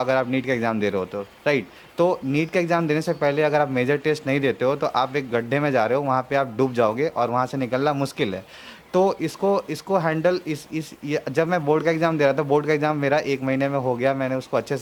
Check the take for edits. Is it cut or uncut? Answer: uncut